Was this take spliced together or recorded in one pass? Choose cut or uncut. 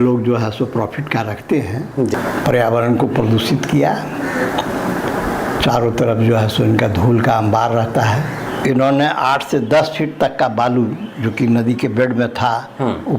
cut